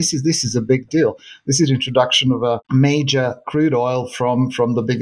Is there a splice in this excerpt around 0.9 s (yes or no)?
no